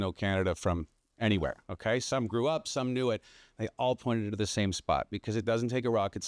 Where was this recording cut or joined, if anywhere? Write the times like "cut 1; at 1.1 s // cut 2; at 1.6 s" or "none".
none